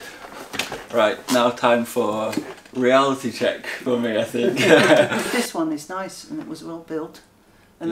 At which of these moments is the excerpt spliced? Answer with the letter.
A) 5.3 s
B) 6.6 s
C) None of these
A